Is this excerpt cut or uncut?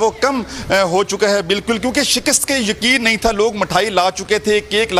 uncut